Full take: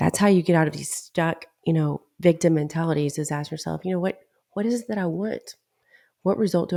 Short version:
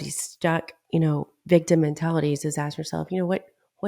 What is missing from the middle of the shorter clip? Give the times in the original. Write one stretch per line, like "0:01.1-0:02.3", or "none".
none